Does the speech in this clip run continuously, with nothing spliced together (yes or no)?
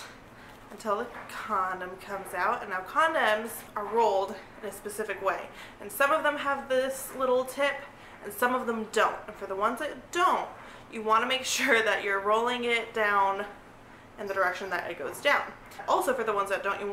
no